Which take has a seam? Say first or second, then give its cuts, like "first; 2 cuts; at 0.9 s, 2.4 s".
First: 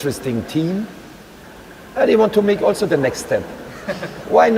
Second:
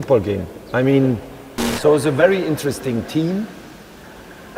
second; 1 cut; at 1.6 s